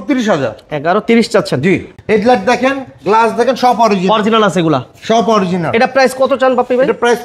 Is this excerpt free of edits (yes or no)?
no